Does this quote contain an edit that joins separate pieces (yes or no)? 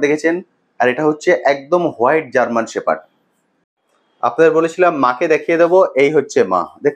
yes